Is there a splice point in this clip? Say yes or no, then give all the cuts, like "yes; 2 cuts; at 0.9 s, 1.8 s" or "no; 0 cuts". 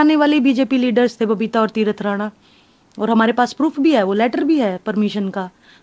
no; 0 cuts